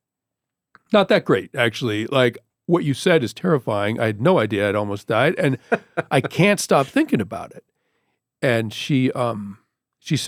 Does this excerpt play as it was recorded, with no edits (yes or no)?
yes